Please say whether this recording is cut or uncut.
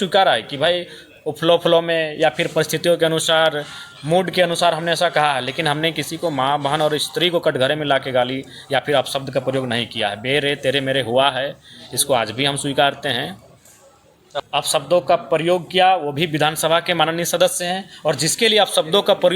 cut